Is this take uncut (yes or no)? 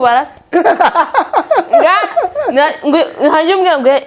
yes